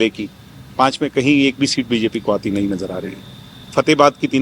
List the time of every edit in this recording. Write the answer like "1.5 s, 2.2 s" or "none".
none